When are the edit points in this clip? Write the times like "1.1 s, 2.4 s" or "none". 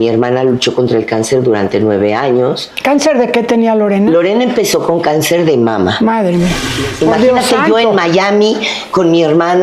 6.7 s